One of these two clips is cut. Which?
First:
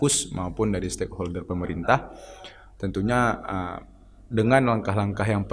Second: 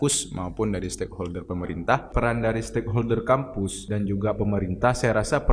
second; 2 cuts; at 2.1 s, 3.8 s

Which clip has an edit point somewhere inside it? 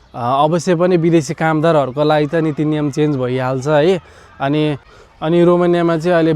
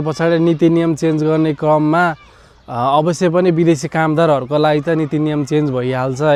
first; 1 cut; at 4.9 s

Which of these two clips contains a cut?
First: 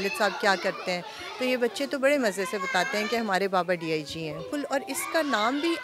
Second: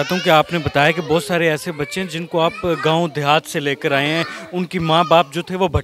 first; 1 cut; at 4.5 s

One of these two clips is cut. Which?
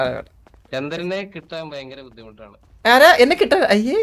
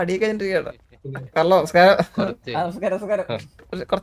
second; 1 cut; at 1.2 s

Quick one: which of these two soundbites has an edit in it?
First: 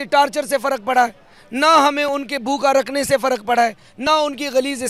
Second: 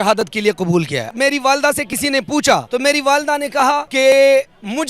second; 3 cuts; at 1.1 s, 2.7 s, 3.9 s

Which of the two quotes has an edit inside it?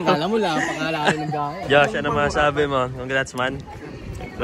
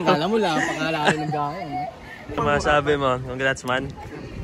first; 1 cut; at 1.9 s

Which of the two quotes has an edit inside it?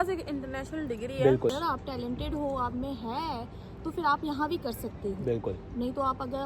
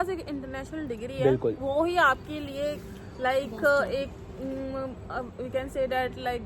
first; 1 cut; at 1.5 s

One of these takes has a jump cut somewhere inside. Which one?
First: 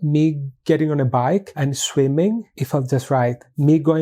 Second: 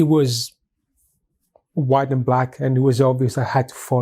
first; 2 cuts; at 1.5 s, 2.5 s

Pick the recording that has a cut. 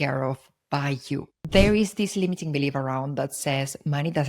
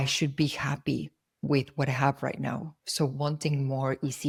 first; 1 cut; at 1.5 s

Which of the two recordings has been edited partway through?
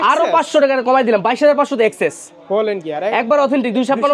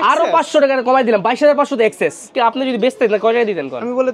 second; 1 cut; at 2.3 s

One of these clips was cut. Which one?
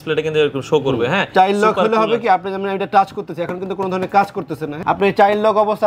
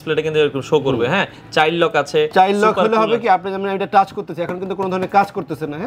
first; 2 cuts; at 1.3 s, 4.7 s

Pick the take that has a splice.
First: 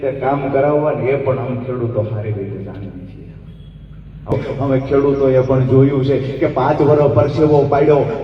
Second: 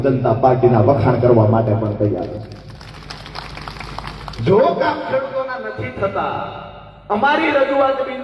first; 1 cut; at 4.3 s

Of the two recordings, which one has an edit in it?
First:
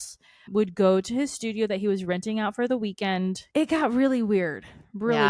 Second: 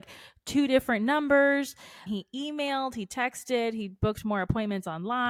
first; 1 cut; at 3.4 s

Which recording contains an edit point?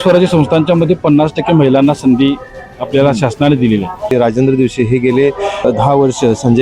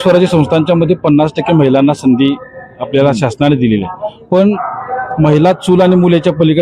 first; 2 cuts; at 4.1 s, 5.6 s

